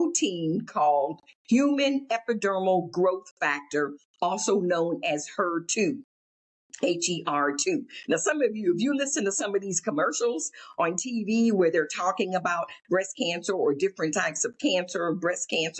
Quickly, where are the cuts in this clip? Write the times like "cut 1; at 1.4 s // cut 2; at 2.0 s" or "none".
none